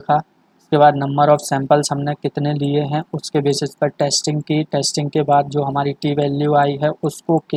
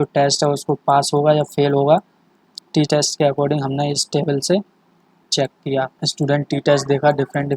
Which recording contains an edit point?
second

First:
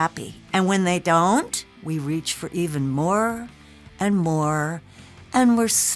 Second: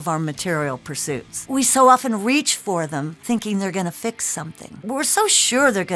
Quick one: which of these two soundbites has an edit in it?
second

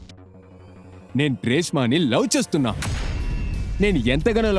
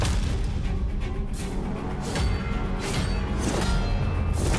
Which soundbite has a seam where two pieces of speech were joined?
first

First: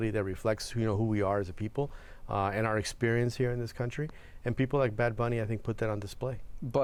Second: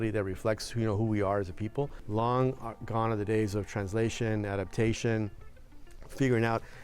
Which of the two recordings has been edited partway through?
second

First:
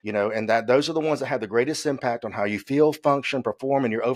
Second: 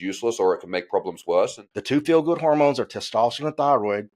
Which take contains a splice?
second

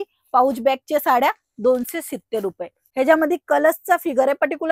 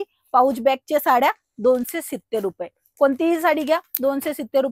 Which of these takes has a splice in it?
first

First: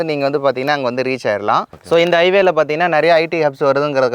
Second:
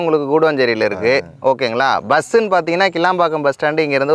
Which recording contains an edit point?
first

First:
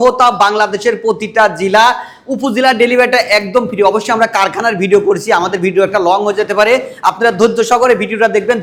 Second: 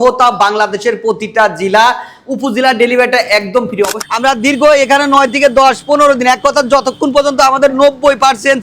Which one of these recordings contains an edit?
second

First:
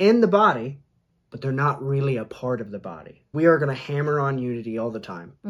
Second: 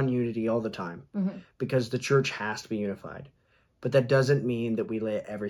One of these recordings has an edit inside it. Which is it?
first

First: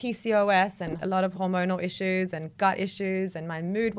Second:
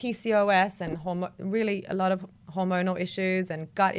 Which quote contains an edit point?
first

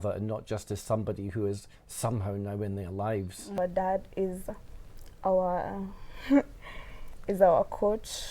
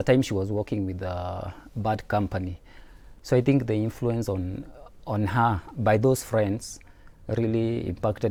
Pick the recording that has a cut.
first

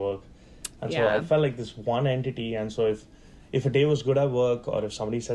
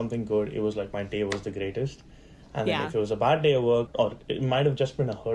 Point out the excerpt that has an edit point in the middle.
second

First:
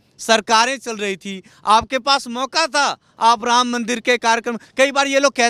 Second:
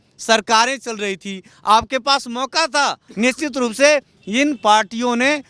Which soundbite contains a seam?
second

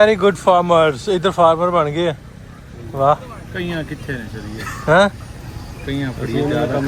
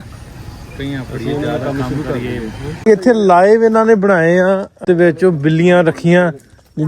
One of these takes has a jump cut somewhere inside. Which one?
second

